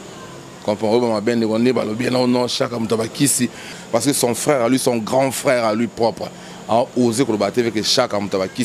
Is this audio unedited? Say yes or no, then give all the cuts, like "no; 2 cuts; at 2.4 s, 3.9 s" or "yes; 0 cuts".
no; 1 cut; at 3.7 s